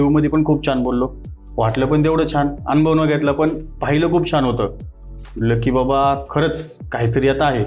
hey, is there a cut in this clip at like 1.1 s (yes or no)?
no